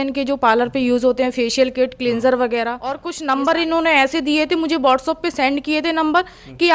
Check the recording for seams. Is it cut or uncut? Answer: cut